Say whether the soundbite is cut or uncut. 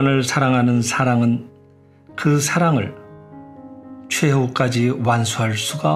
cut